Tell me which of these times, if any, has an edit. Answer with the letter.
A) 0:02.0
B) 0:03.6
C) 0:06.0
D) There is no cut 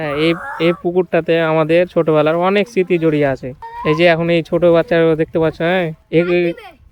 D